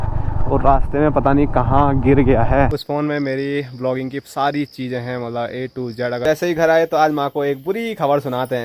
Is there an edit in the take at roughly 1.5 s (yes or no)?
no